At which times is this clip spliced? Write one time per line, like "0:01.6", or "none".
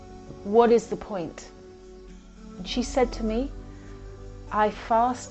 none